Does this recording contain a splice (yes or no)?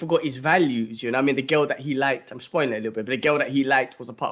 no